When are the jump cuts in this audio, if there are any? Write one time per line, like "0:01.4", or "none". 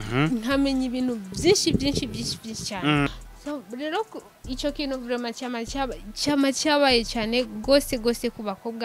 0:03.1

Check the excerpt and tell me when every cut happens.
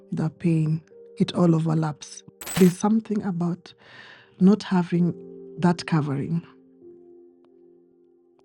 0:02.6

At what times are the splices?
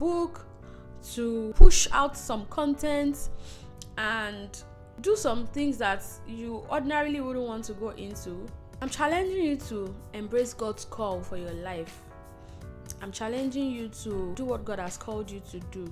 0:01.5
0:05.0
0:08.6
0:14.3

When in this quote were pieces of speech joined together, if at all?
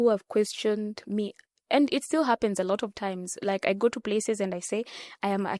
none

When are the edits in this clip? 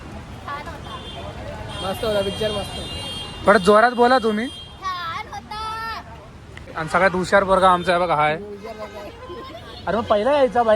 0:06.7

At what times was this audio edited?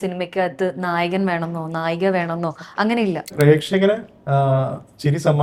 0:03.3

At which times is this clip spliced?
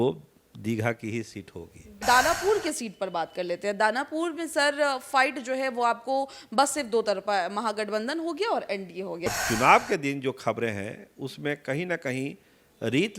0:02.0
0:09.3

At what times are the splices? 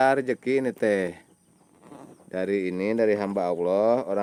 none

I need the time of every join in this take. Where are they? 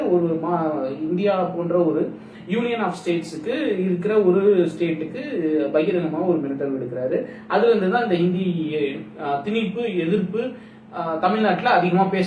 none

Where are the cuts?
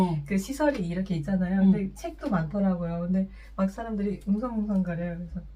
none

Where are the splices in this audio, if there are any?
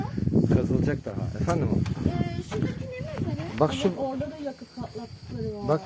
none

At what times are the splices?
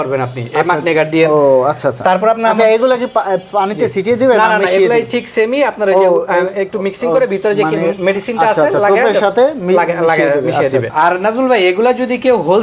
0:10.9

